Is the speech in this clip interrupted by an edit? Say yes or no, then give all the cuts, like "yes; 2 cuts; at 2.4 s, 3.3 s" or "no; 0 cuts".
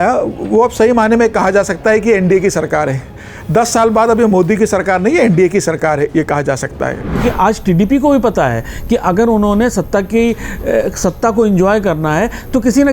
yes; 1 cut; at 7.2 s